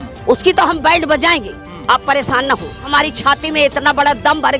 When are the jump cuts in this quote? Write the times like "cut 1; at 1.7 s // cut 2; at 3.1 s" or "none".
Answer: cut 1; at 2.8 s